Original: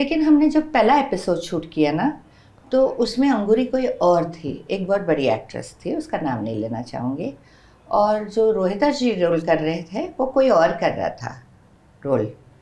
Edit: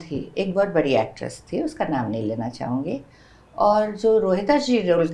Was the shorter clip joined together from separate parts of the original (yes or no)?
no